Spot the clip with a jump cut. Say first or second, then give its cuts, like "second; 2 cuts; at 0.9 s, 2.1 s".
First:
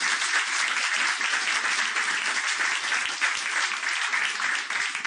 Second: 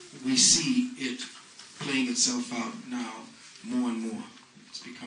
first; 1 cut; at 1.2 s